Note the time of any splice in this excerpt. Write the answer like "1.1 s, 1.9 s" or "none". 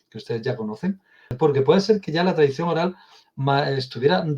1.3 s